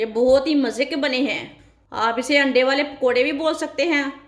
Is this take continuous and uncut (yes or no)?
yes